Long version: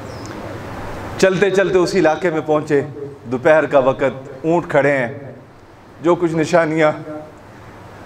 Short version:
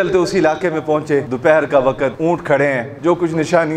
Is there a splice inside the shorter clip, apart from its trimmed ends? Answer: yes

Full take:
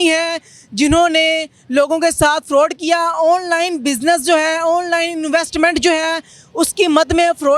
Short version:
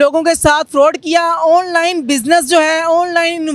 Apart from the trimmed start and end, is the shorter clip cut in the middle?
no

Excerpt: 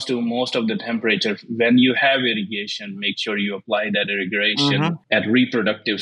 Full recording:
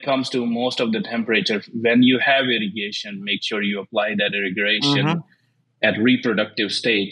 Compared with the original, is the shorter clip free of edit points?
no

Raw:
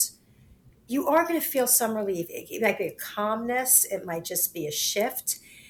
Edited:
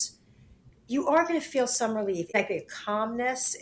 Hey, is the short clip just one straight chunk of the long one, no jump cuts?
no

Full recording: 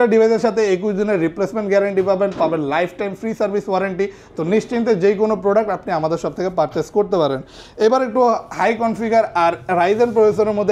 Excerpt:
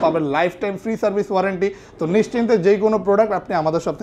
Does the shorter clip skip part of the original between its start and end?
no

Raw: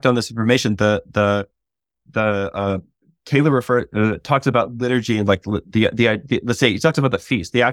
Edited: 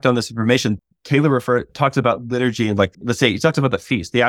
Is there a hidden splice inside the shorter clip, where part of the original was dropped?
yes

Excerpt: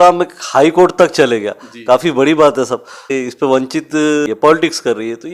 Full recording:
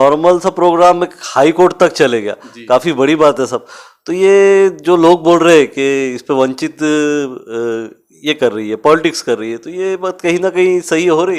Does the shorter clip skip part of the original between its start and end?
yes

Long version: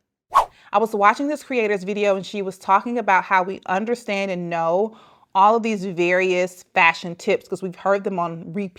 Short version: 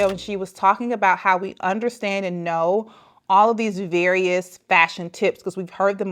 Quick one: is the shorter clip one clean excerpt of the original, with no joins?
yes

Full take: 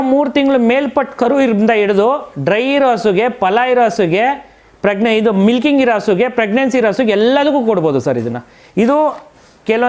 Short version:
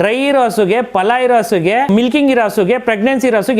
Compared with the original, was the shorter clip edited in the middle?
yes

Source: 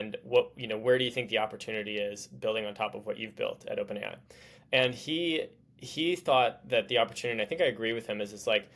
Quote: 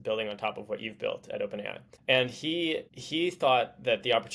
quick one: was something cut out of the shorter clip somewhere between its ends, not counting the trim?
yes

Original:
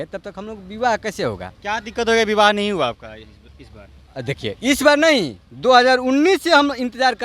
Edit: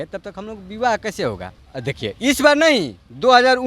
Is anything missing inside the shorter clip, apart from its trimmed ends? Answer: yes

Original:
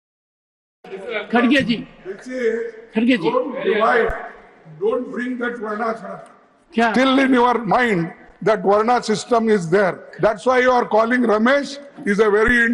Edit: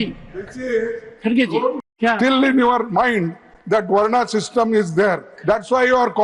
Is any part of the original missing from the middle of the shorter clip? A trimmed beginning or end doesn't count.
yes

